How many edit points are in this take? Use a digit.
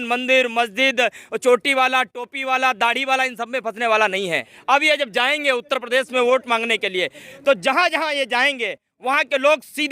1